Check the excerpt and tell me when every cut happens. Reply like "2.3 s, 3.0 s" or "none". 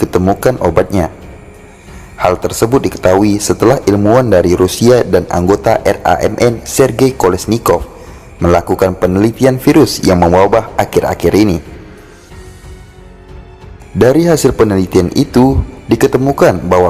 11.9 s, 13.8 s